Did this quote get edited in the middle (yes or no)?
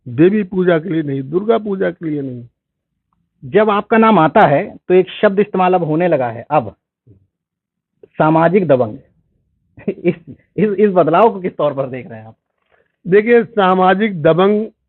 no